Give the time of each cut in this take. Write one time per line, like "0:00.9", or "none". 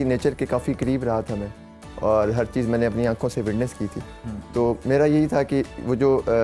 none